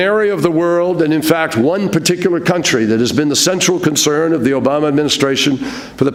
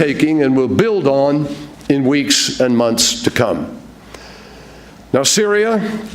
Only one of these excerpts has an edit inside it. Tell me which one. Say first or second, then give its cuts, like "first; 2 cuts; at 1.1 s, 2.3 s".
second; 1 cut; at 2.6 s